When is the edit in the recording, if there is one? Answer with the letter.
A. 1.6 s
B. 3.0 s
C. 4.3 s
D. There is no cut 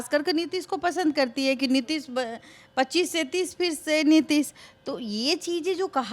D